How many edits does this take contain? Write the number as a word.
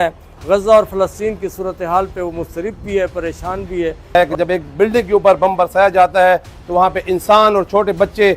one